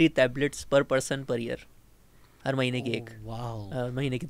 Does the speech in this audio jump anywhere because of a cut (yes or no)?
no